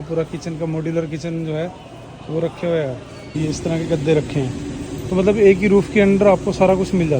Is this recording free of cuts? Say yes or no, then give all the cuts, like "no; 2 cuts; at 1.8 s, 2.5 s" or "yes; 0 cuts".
no; 1 cut; at 3.4 s